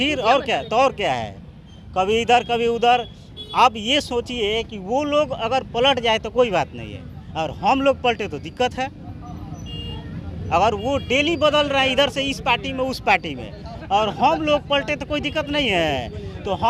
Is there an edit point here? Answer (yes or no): no